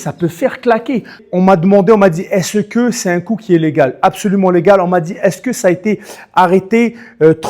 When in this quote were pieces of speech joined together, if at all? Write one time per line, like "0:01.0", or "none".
0:01.2